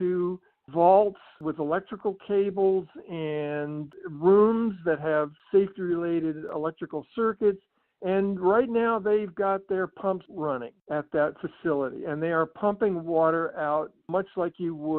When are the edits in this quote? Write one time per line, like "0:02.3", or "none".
0:05.4
0:06.5
0:10.4